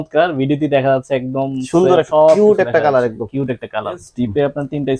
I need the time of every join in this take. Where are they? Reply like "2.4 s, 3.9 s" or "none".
4.0 s